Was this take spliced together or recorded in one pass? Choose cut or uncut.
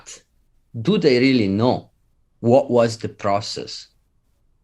cut